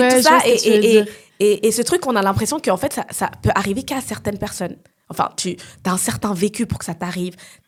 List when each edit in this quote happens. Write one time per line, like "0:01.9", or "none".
none